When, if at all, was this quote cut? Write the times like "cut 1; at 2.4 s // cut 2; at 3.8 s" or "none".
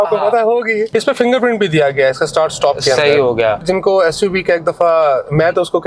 cut 1; at 0.9 s // cut 2; at 3.6 s